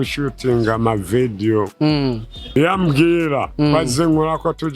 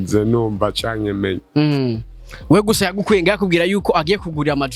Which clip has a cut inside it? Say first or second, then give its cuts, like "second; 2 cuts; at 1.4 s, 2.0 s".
first; 1 cut; at 2.6 s